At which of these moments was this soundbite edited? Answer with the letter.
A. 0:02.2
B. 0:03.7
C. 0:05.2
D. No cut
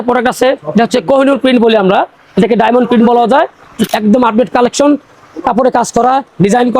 B